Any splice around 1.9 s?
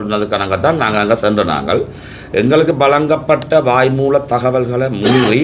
no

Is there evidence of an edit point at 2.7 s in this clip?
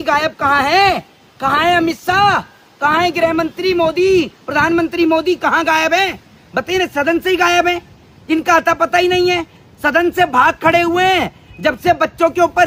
no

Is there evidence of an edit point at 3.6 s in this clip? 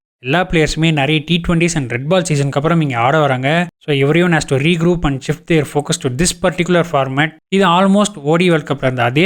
no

